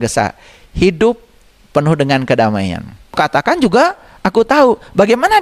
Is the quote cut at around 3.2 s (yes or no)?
yes